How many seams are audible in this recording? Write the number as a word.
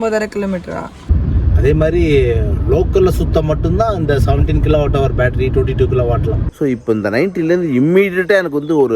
two